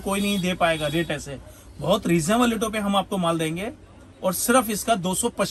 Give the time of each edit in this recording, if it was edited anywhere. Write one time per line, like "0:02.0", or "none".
none